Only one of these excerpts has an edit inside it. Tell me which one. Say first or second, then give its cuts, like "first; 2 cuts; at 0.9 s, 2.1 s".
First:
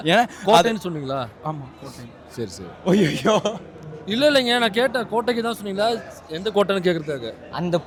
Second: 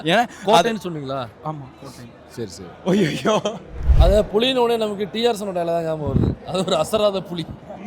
second; 1 cut; at 3.9 s